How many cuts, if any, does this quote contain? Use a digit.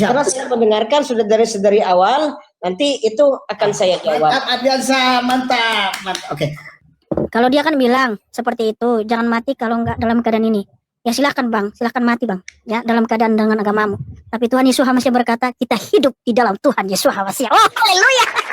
1